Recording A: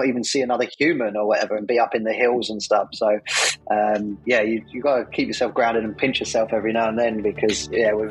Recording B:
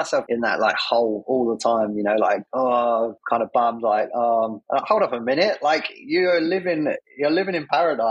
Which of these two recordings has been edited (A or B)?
B